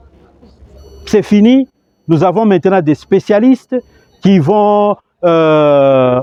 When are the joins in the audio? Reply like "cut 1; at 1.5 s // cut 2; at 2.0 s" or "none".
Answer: none